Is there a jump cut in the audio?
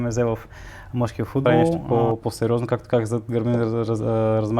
yes; 1 cut; at 1.8 s

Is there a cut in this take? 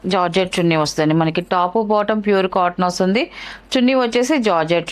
no; 0 cuts

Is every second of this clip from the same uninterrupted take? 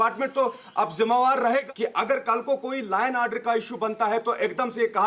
no; 1 cut; at 1.6 s

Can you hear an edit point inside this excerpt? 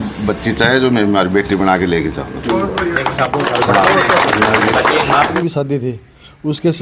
yes; 1 cut; at 5.3 s

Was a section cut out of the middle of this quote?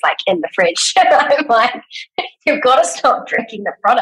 no; 0 cuts

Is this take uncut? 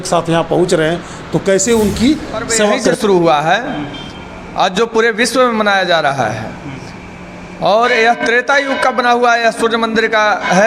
no; 1 cut; at 2.9 s

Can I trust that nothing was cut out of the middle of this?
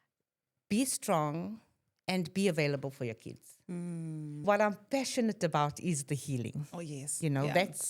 no; 1 cut; at 4.4 s

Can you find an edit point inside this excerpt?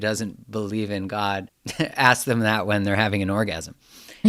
yes; 1 cut; at 1.6 s

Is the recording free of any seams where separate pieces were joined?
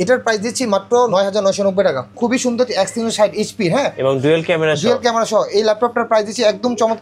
no; 2 cuts; at 1.1 s, 2.1 s

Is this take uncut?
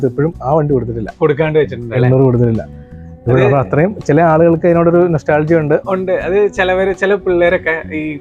yes; 0 cuts

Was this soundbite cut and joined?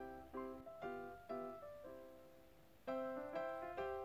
no; 0 cuts

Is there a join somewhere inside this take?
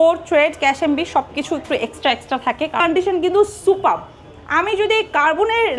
yes; 1 cut; at 2.8 s

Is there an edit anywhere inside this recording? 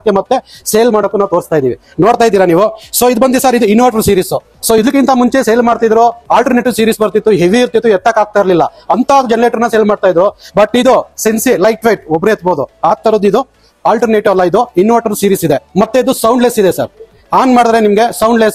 no; 0 cuts

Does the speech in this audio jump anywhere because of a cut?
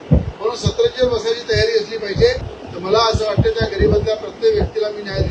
yes; 1 cut; at 2.5 s

